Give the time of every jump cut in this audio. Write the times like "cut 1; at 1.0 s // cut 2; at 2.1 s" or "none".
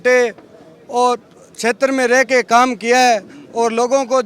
none